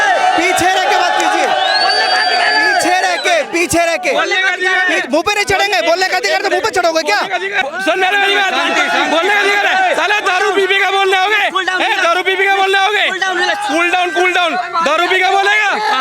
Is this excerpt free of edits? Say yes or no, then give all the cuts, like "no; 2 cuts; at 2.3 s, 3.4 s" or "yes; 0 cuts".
no; 1 cut; at 7.6 s